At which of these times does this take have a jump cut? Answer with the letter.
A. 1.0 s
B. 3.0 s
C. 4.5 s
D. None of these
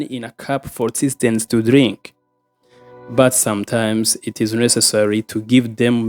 D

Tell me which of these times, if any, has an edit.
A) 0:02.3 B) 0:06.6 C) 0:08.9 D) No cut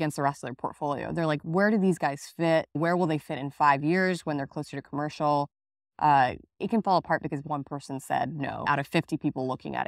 B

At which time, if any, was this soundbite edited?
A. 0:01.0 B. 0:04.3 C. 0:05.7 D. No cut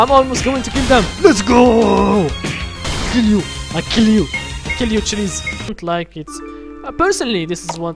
C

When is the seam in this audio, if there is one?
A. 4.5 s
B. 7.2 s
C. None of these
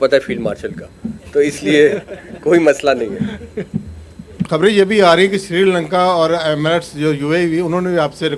A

